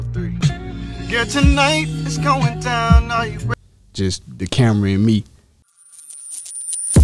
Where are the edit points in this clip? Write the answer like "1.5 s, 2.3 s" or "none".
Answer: 5.7 s

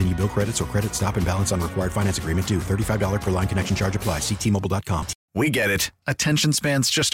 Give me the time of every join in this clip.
5.2 s

